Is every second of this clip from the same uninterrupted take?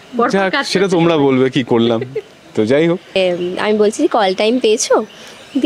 no; 1 cut; at 3.2 s

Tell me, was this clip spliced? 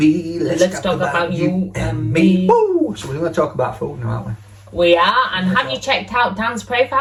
no; 0 cuts

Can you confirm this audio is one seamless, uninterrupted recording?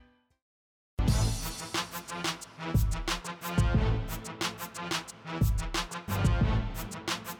no; 2 cuts; at 1.0 s, 2.5 s

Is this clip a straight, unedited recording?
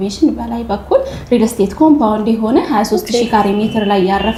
yes; 0 cuts

